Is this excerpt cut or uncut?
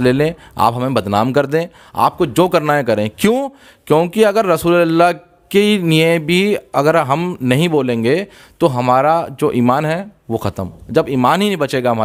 uncut